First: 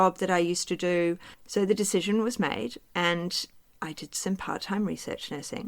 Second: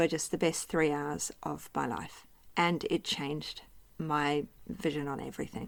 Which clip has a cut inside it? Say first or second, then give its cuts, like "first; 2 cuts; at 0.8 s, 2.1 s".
first; 1 cut; at 1.3 s